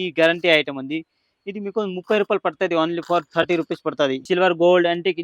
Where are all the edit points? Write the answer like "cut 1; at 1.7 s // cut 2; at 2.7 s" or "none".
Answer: cut 1; at 4.2 s